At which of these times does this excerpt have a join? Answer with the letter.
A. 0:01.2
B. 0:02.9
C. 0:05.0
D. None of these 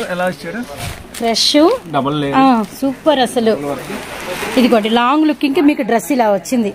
D